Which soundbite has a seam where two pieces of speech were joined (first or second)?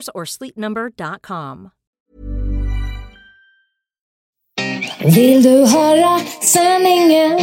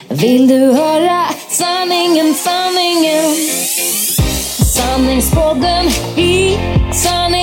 first